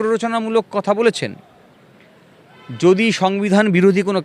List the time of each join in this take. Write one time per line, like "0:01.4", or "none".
none